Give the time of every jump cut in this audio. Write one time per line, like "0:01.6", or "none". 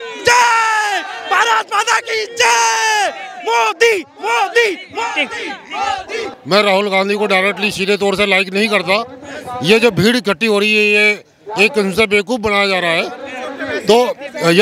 0:06.3